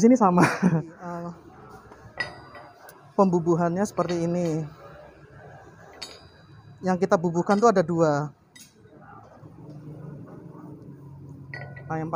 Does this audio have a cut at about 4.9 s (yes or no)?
no